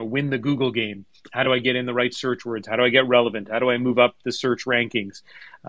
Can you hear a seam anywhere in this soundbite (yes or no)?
no